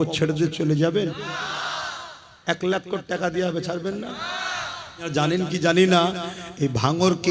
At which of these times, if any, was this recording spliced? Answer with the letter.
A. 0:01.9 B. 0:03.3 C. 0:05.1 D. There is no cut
C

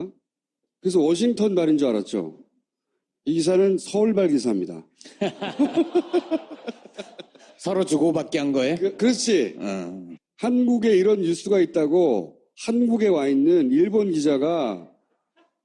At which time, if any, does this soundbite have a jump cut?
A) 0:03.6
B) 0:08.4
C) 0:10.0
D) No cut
A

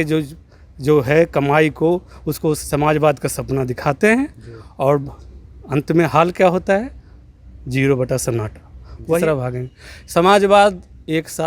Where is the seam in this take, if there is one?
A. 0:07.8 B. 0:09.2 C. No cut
B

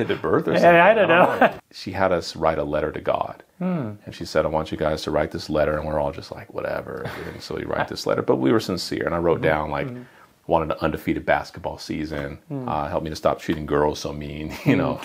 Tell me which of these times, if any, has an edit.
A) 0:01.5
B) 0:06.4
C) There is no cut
A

